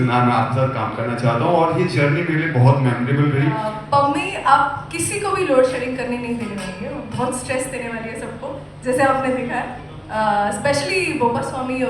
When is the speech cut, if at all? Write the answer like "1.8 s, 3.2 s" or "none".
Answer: 3.6 s